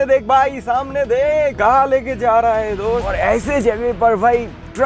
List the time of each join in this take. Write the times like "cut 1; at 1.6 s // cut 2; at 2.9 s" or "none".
cut 1; at 1.6 s // cut 2; at 3.1 s